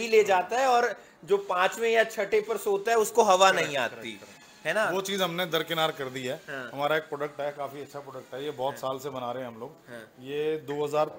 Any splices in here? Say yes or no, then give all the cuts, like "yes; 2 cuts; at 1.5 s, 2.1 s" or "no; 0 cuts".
no; 0 cuts